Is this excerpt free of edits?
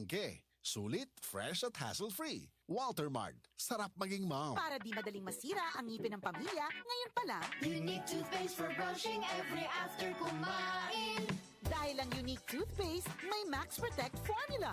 no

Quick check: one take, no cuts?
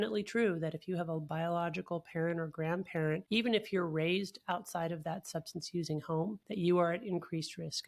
no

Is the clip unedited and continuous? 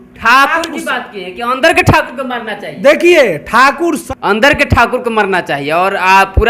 no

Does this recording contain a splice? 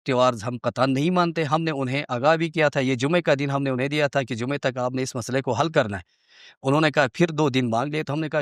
no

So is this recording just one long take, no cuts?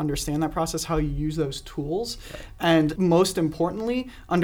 no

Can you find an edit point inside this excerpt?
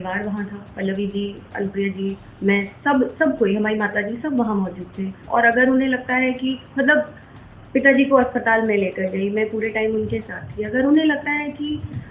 yes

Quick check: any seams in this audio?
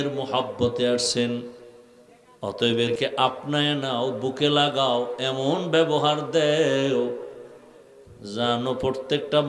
yes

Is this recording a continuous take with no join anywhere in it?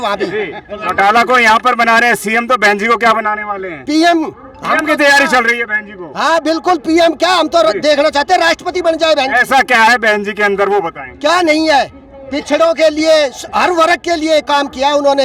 yes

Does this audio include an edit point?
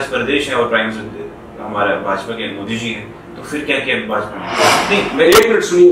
yes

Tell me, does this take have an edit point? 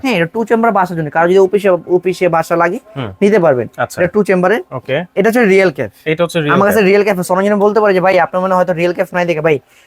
no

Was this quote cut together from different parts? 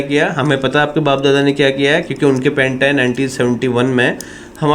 no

